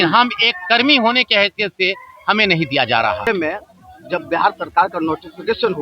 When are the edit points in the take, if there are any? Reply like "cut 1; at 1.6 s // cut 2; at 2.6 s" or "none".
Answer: cut 1; at 3.3 s